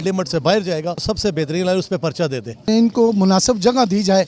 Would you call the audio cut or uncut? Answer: cut